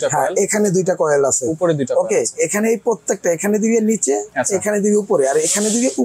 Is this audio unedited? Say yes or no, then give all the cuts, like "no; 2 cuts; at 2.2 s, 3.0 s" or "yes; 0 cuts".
yes; 0 cuts